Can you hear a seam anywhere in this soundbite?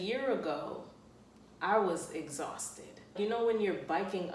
yes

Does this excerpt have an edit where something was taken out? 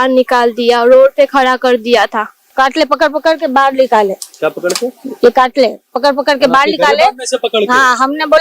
yes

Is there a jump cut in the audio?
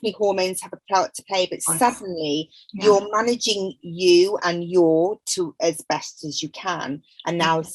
no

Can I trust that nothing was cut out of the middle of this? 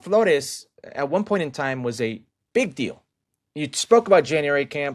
yes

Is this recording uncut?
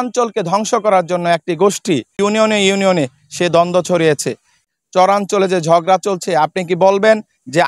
no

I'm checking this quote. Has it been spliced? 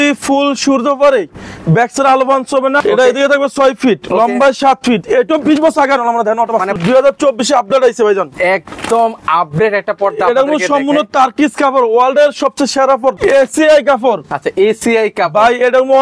yes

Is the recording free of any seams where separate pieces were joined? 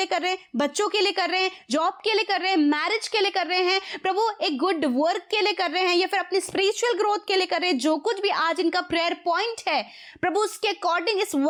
yes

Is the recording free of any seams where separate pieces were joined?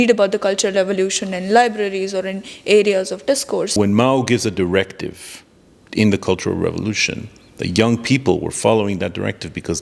no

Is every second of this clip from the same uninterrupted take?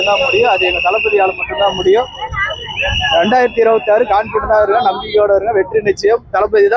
yes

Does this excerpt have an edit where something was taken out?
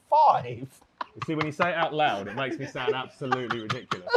no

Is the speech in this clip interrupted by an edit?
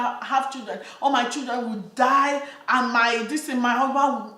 no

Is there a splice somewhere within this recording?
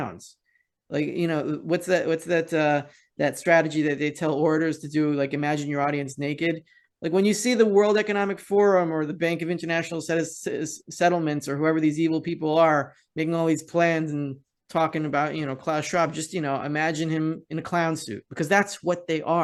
no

